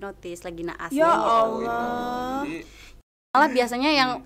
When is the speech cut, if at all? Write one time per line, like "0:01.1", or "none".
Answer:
0:03.3